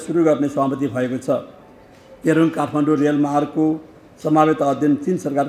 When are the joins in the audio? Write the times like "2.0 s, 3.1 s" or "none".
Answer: none